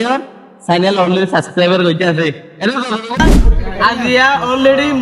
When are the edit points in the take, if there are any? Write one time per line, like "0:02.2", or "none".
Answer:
0:03.2